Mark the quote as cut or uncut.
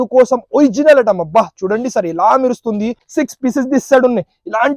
cut